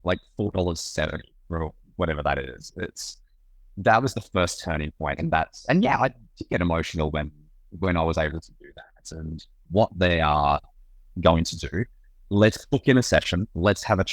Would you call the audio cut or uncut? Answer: cut